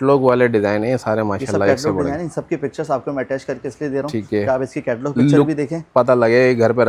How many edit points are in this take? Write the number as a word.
zero